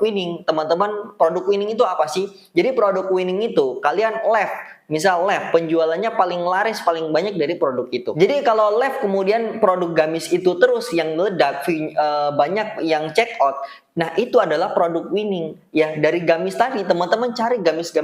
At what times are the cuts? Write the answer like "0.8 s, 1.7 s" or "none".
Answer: 8.1 s